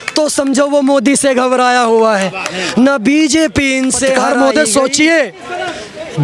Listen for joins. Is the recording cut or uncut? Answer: cut